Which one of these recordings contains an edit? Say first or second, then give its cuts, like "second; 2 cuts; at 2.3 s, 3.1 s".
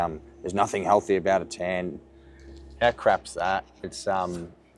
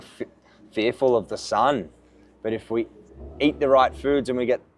first; 1 cut; at 3.7 s